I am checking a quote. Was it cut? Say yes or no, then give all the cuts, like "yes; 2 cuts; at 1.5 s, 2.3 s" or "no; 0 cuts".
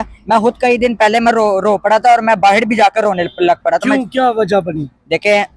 no; 0 cuts